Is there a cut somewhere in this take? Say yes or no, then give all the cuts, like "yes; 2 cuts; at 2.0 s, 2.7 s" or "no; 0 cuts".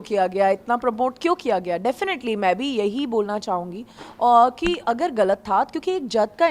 no; 0 cuts